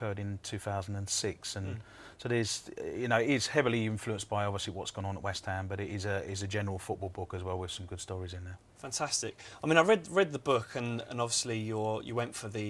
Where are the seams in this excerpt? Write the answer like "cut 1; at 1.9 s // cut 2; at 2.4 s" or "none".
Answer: cut 1; at 8.0 s